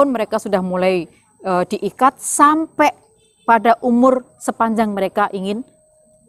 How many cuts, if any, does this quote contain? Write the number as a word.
zero